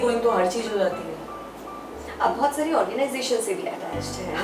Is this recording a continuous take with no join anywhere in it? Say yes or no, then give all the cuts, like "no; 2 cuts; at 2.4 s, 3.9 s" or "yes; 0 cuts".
yes; 0 cuts